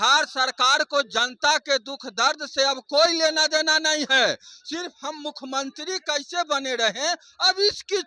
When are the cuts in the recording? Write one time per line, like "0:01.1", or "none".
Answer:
none